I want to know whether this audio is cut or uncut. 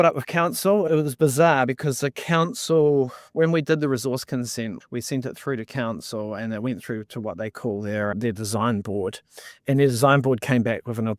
cut